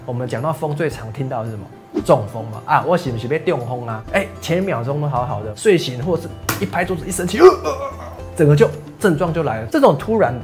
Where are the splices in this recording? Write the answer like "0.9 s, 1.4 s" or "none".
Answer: 3.9 s, 5.5 s, 9.6 s